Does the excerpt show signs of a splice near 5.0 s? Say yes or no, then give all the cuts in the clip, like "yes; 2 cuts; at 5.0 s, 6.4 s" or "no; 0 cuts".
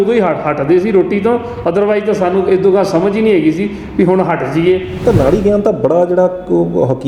yes; 1 cut; at 5.0 s